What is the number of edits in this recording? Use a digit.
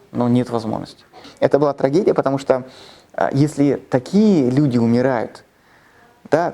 1